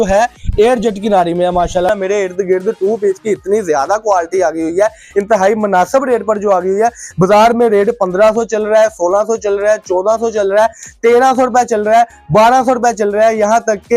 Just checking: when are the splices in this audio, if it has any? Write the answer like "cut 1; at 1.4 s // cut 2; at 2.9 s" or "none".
cut 1; at 1.9 s